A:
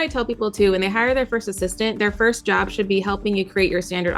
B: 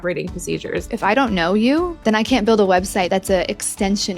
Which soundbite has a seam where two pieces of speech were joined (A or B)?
B